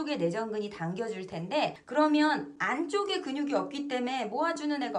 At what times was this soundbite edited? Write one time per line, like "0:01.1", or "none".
0:01.8